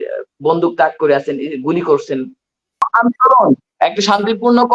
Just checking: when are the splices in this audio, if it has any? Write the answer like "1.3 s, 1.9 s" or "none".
2.9 s